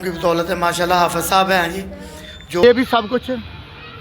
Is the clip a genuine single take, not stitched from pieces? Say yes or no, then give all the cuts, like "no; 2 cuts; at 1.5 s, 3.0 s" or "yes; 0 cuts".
no; 1 cut; at 2.6 s